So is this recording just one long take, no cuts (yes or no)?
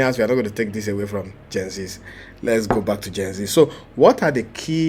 yes